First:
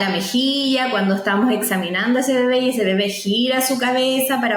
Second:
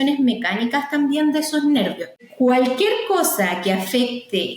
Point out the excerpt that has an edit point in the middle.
second; 1 cut; at 2.2 s

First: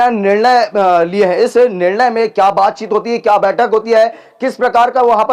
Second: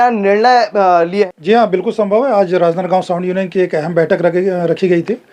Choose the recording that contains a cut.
second; 1 cut; at 1.3 s

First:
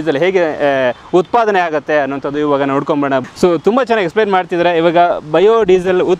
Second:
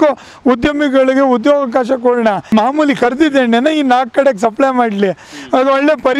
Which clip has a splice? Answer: second; 1 cut; at 2.5 s

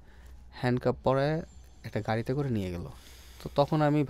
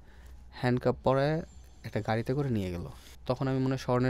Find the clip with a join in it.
second; 1 cut; at 3.0 s

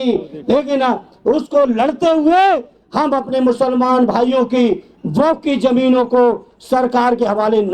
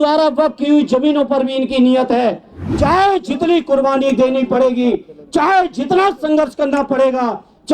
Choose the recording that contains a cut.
second; 1 cut; at 2.6 s

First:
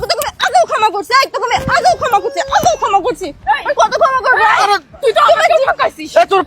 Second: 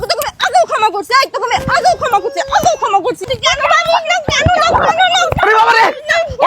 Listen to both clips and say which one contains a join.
second; 1 cut; at 3.3 s

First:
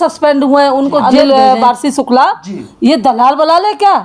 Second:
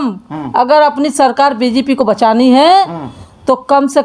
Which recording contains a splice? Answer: first; 1 cut; at 1.0 s

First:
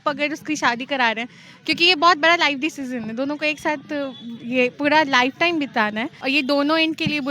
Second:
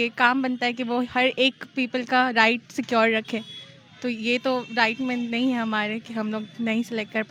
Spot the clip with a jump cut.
first; 1 cut; at 6.1 s

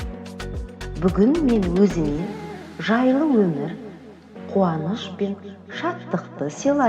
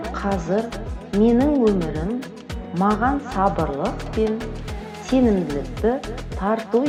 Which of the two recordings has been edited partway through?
first; 1 cut; at 1.0 s

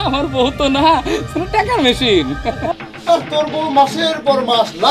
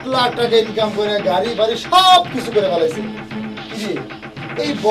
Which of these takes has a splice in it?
first; 1 cut; at 2.7 s

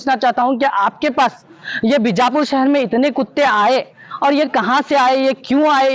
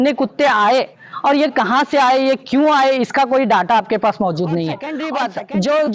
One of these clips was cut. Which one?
second; 1 cut; at 4.9 s

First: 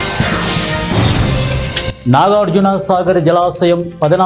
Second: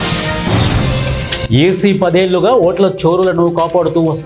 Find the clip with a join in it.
first; 1 cut; at 1.9 s

